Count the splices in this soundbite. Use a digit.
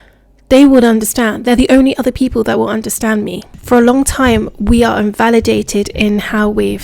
1